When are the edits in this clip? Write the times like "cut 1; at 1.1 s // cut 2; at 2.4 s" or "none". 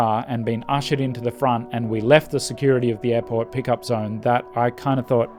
none